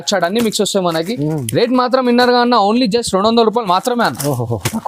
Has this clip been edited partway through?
no; 0 cuts

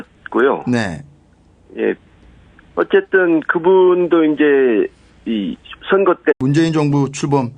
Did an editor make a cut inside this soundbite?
no; 0 cuts

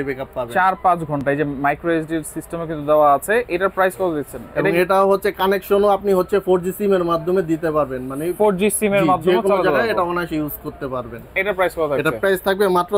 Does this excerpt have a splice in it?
no; 0 cuts

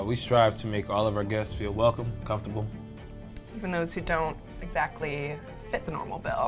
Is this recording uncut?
yes; 0 cuts

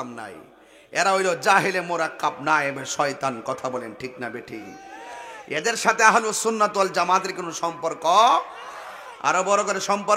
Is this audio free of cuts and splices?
yes; 0 cuts

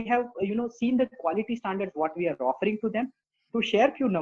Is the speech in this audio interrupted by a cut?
yes; 1 cut; at 3.2 s

